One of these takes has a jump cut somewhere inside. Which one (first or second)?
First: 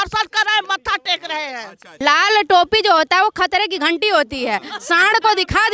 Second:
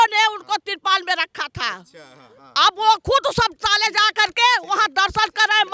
first